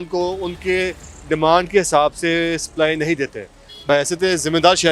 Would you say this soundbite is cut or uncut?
cut